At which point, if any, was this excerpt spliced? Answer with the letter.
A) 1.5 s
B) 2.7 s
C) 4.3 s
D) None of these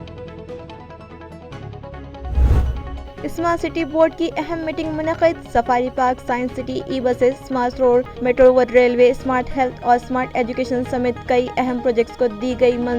B